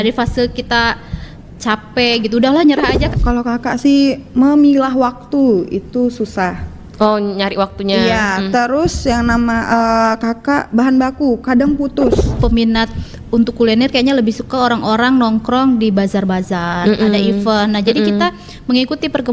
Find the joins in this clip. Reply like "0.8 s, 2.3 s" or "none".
3.0 s, 12.4 s